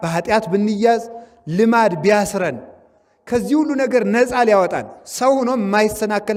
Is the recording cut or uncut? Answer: uncut